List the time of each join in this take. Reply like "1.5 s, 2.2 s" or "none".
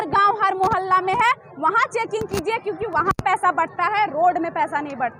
none